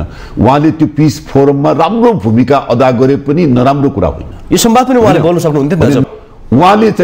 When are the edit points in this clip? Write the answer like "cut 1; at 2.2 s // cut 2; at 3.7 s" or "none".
cut 1; at 6.0 s